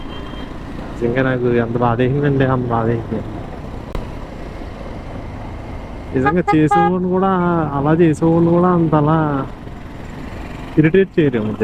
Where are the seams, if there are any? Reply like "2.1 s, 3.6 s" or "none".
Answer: none